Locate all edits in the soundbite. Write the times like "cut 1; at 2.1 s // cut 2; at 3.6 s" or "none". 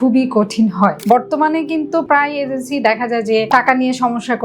cut 1; at 1.0 s // cut 2; at 2.0 s // cut 3; at 3.5 s